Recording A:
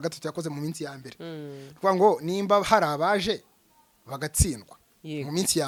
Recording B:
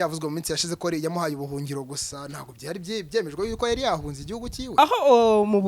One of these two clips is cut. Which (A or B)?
B